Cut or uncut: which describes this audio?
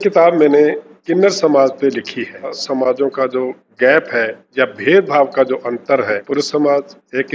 cut